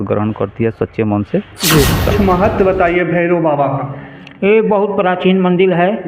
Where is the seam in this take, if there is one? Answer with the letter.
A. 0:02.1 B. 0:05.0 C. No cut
A